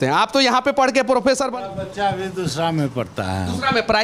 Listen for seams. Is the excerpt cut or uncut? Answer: cut